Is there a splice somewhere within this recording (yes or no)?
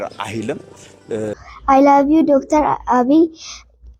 yes